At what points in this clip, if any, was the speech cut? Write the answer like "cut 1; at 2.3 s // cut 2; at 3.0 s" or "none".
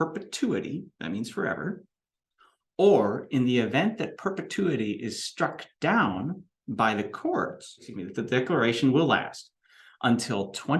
cut 1; at 8.0 s